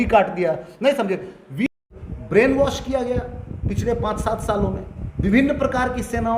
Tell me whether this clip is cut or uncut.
cut